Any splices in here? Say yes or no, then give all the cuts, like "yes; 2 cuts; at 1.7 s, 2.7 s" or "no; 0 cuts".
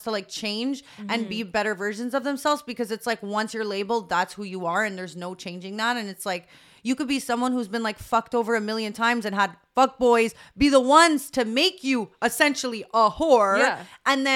no; 0 cuts